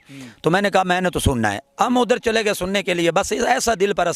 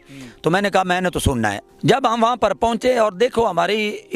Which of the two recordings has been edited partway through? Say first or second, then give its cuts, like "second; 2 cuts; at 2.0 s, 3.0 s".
second; 1 cut; at 1.6 s